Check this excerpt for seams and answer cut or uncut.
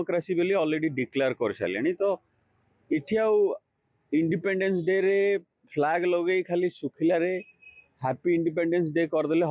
uncut